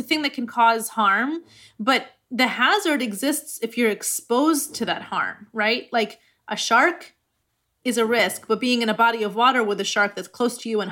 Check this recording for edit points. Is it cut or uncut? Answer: uncut